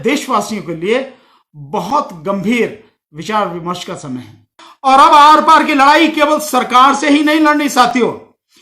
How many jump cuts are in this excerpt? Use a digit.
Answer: 1